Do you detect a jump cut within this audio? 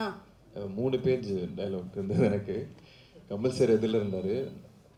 no; 0 cuts

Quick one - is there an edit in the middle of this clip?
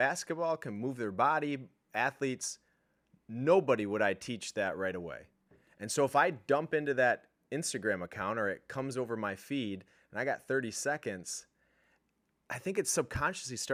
no; 0 cuts

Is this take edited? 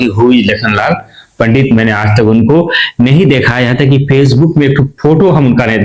no; 0 cuts

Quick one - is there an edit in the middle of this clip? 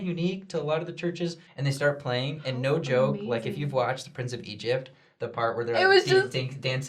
yes; 1 cut; at 1.5 s

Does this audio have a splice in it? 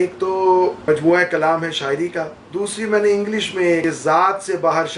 yes; 3 cuts; at 0.8 s, 2.4 s, 3.8 s

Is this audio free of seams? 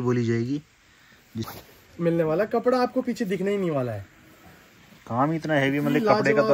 no; 1 cut; at 1.5 s

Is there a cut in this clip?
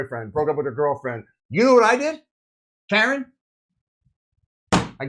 yes; 1 cut; at 1.4 s

